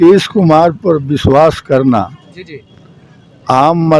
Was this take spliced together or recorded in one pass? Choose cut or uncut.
uncut